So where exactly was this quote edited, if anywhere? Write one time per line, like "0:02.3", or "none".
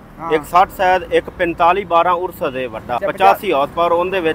0:03.0